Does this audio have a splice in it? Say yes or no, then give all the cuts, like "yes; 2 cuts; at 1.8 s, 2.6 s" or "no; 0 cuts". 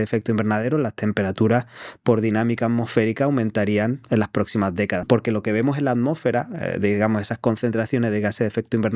yes; 1 cut; at 5.0 s